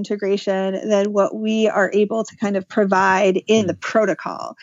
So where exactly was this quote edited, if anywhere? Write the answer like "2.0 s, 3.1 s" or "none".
none